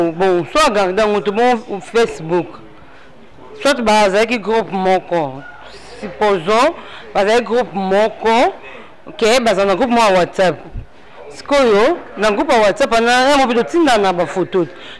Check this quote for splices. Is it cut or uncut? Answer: uncut